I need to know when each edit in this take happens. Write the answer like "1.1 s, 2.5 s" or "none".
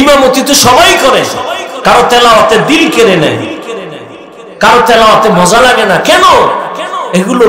none